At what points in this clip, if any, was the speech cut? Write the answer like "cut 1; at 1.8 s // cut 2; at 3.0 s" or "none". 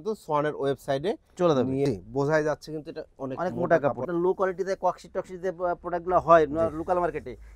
cut 1; at 1.9 s // cut 2; at 4.1 s